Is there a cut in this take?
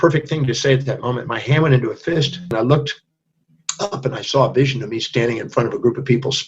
yes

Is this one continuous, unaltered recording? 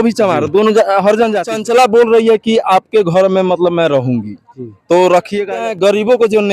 no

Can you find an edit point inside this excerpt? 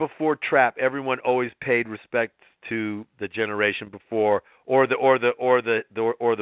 no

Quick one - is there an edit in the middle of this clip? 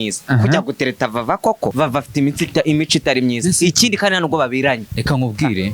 yes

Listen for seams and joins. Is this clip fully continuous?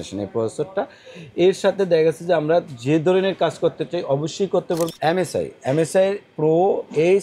no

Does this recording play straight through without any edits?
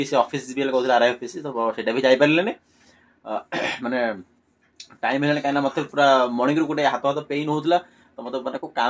yes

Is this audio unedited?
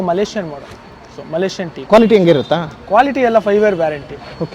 yes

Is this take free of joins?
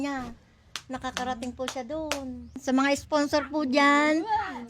no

